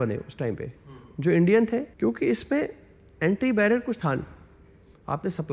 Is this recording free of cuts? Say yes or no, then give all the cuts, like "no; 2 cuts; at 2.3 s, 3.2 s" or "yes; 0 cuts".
no; 1 cut; at 1.9 s